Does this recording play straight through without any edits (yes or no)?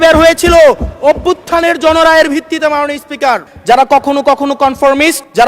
no